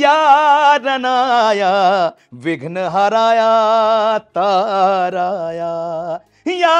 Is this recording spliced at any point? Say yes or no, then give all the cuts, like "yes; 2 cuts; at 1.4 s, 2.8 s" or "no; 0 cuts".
no; 0 cuts